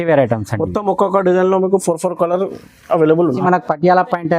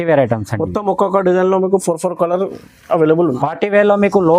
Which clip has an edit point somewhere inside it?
first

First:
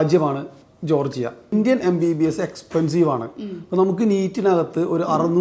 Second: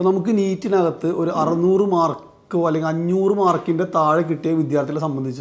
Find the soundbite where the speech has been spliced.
first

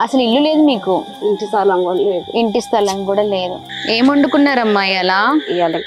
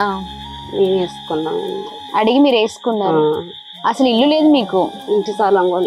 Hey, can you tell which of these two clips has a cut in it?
first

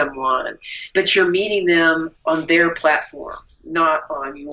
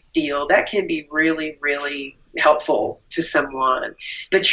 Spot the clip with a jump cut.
first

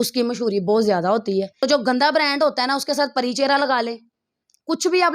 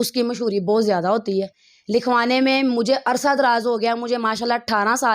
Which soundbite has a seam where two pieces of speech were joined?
first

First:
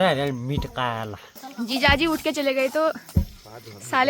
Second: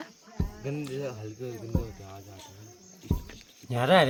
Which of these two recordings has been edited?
first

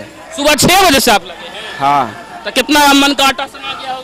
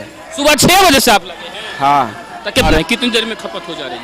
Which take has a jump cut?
second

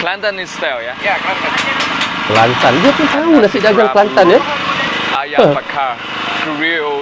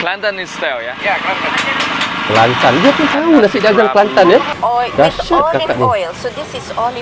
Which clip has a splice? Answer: second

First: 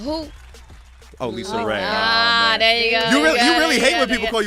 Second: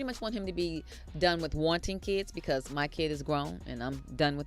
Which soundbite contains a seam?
first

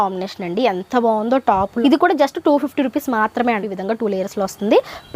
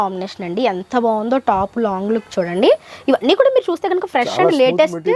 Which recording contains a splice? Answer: first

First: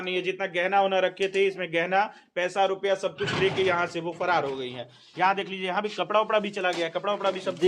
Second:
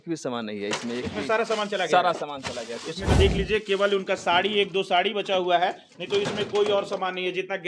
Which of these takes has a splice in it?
second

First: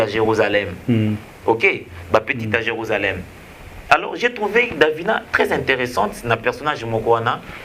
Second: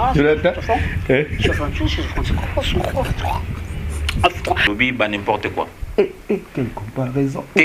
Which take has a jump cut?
second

